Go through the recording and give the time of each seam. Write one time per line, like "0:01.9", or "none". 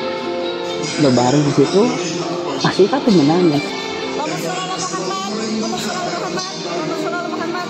0:03.7